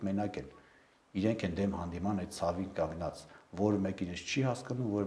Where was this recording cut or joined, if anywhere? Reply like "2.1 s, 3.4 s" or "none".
none